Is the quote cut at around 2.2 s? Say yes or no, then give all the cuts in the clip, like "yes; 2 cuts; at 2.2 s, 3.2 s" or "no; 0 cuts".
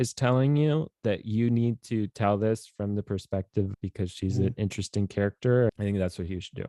no; 2 cuts; at 3.7 s, 5.7 s